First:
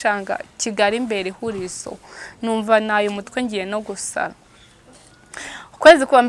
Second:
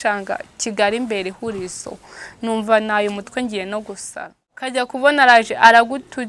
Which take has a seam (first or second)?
second